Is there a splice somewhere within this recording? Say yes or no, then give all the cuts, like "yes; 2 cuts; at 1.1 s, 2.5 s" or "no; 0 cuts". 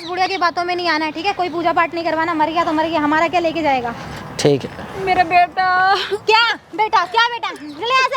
no; 0 cuts